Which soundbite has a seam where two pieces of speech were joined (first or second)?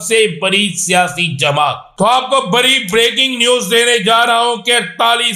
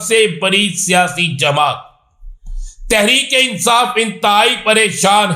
first